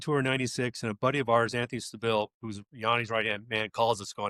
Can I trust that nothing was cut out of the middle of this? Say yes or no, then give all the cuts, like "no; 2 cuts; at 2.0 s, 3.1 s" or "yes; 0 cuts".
yes; 0 cuts